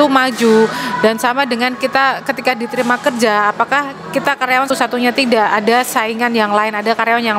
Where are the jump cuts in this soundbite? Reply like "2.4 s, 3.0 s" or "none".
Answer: 4.7 s